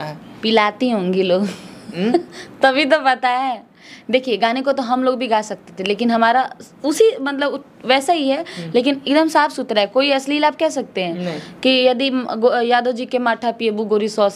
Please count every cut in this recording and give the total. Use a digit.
0